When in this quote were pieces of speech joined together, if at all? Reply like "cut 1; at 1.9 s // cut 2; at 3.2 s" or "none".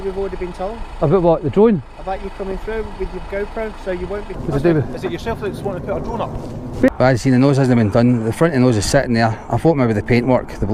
cut 1; at 4.3 s // cut 2; at 6.9 s